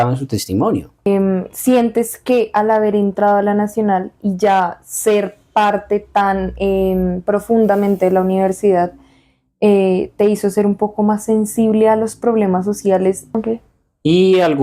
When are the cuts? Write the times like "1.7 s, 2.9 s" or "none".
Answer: 1.1 s, 13.2 s